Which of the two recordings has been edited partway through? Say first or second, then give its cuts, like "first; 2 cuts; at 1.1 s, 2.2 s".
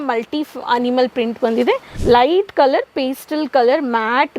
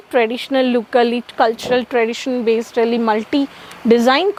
first; 1 cut; at 1.9 s